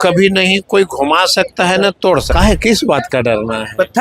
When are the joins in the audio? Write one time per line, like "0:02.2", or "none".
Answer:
0:02.3